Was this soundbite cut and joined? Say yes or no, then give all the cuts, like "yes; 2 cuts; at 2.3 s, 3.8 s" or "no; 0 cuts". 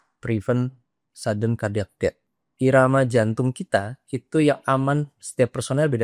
yes; 1 cut; at 2.3 s